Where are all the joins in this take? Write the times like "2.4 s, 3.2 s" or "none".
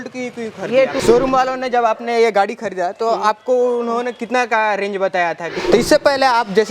1.0 s, 5.5 s